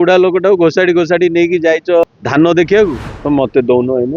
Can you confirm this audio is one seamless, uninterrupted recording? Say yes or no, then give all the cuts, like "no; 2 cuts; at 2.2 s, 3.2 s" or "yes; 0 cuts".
no; 2 cuts; at 2.0 s, 3.1 s